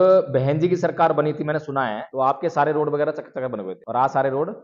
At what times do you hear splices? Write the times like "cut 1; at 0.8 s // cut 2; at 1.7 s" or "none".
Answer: cut 1; at 2.0 s // cut 2; at 3.8 s